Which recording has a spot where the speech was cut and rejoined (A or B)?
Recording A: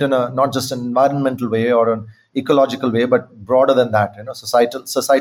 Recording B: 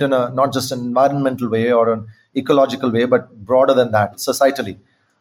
B